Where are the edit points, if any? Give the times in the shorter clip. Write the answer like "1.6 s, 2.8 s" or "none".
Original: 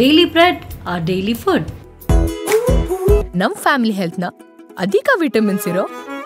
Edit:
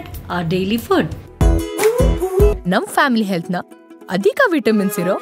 1.2 s